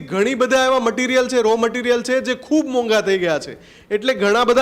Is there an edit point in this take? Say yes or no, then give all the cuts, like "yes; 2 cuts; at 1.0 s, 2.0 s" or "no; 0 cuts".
no; 0 cuts